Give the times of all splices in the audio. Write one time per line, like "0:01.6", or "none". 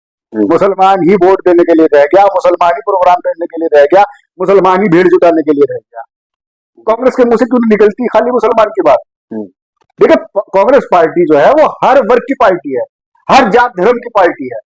none